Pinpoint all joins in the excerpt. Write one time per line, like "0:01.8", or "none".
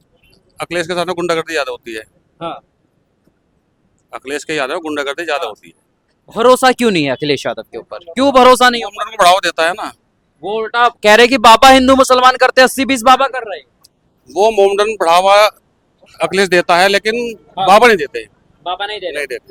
none